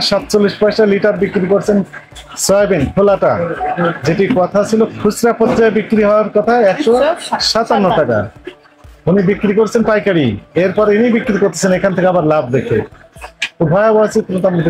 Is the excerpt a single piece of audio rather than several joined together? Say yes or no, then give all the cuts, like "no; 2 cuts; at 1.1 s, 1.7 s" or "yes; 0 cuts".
yes; 0 cuts